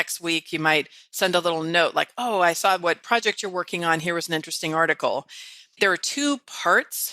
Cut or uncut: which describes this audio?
cut